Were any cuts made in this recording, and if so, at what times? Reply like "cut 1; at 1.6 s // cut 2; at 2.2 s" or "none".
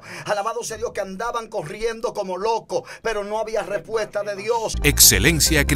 cut 1; at 4.8 s